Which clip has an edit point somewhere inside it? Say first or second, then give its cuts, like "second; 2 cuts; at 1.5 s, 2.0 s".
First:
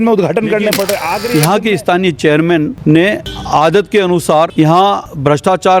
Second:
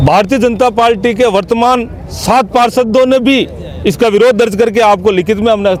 first; 3 cuts; at 1.1 s, 3.1 s, 4.8 s